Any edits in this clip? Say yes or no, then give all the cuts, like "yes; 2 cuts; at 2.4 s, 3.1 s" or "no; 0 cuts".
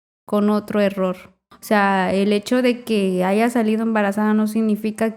yes; 1 cut; at 1.4 s